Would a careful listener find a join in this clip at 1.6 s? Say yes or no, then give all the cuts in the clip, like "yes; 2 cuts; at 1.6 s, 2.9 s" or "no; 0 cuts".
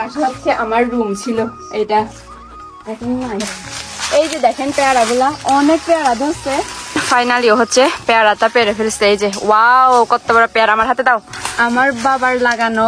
no; 3 cuts; at 3.7 s, 7.1 s, 11.3 s